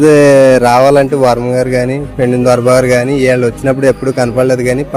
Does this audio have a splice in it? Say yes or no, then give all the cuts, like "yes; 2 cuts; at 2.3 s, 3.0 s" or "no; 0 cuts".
no; 0 cuts